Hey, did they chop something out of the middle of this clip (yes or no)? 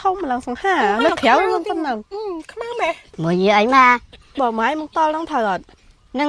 yes